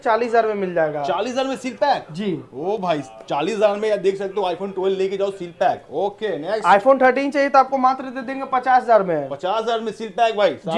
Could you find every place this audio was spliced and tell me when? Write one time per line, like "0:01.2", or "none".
none

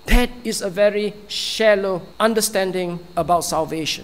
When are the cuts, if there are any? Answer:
0:02.1

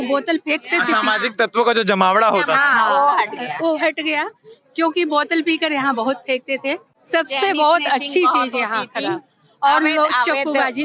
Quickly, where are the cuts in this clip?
none

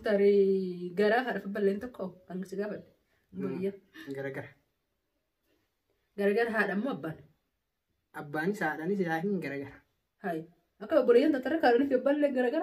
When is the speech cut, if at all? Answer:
none

